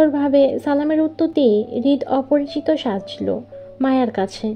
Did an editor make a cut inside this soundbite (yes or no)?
no